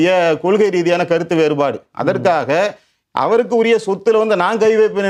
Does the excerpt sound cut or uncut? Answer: uncut